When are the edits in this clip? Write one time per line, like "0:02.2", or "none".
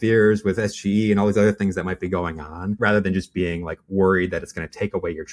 none